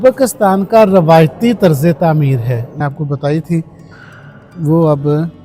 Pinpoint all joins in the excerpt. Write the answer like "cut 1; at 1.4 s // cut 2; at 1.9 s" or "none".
cut 1; at 2.8 s